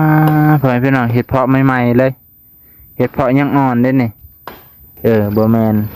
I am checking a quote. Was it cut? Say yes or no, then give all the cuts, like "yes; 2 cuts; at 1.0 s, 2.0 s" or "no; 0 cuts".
yes; 1 cut; at 4.9 s